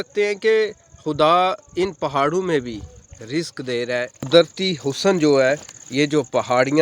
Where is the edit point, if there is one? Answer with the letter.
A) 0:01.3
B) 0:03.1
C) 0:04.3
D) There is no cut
C